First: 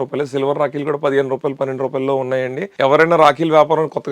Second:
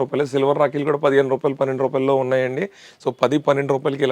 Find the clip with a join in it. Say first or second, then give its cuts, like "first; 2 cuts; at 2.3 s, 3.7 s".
first; 1 cut; at 2.6 s